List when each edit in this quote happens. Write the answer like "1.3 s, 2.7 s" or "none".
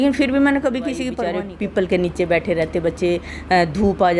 1.2 s